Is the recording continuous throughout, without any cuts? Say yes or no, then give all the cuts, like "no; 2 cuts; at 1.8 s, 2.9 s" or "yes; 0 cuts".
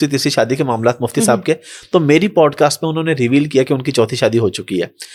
yes; 0 cuts